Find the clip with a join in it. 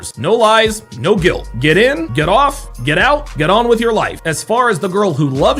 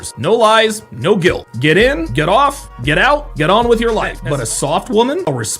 second; 1 cut; at 4.2 s

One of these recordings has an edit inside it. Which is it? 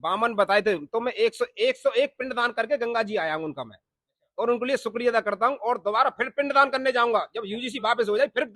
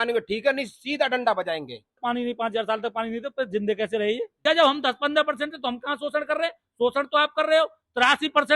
second; 2 cuts; at 1.9 s, 4.4 s

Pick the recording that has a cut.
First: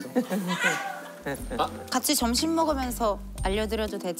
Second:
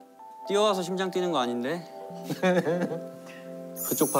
first; 1 cut; at 1.8 s

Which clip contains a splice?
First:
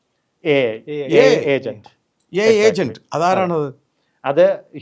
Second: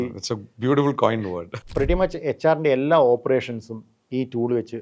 second; 1 cut; at 1.5 s

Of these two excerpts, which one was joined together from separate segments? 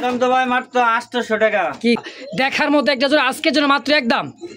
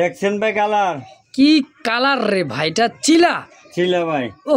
first; 1 cut; at 2.0 s

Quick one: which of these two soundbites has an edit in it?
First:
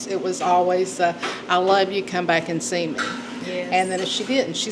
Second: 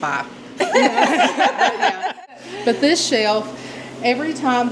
second; 1 cut; at 2.2 s

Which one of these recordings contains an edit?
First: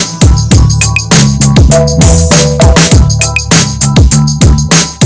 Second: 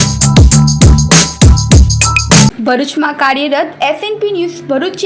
second; 1 cut; at 2.6 s

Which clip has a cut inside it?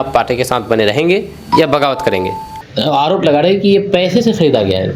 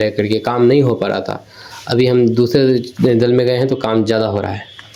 first; 1 cut; at 2.7 s

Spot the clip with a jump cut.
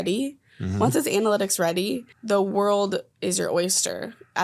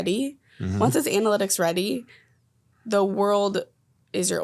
first; 2 cuts; at 2.1 s, 3.1 s

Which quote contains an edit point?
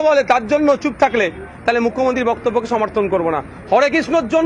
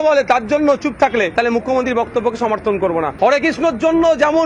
second; 2 cuts; at 1.3 s, 3.1 s

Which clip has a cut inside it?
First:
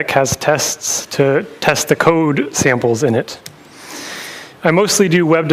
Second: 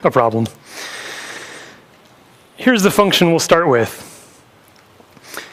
first; 1 cut; at 2.3 s

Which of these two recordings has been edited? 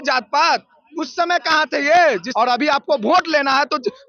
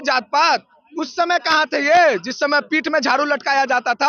first; 1 cut; at 2.3 s

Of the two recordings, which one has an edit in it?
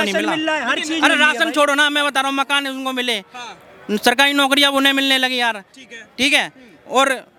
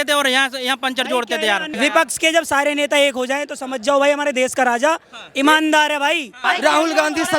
second; 2 cuts; at 1.7 s, 6.4 s

